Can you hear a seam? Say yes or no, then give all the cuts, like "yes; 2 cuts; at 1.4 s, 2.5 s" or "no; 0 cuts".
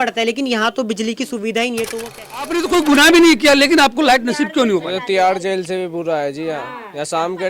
yes; 1 cut; at 2.5 s